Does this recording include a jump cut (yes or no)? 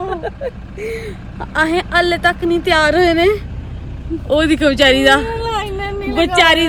no